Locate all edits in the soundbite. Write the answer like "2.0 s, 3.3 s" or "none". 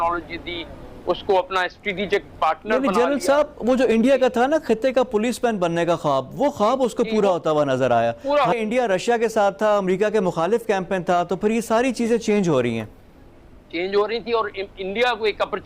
8.5 s